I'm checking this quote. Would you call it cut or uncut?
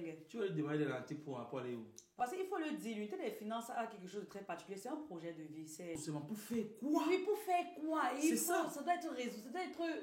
cut